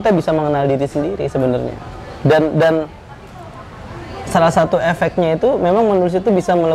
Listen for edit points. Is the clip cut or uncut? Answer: uncut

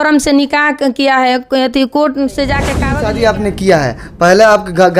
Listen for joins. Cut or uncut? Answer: cut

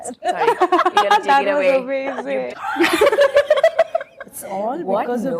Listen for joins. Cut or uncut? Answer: cut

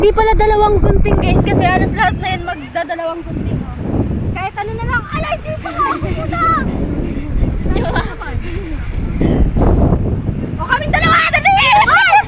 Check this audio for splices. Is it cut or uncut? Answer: uncut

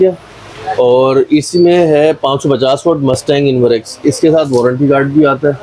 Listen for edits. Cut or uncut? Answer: uncut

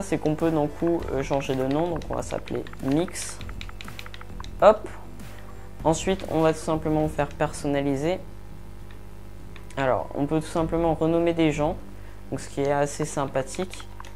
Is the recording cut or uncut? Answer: cut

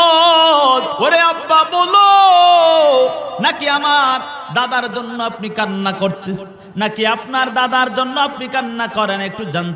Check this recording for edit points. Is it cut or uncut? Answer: cut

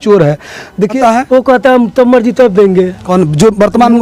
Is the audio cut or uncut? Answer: cut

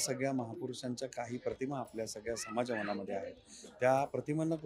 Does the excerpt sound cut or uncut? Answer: uncut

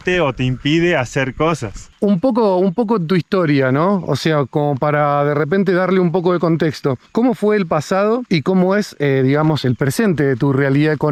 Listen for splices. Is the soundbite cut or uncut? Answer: uncut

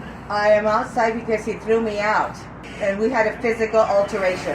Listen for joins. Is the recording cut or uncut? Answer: cut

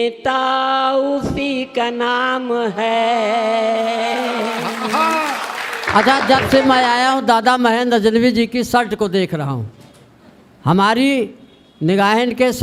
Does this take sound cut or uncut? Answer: cut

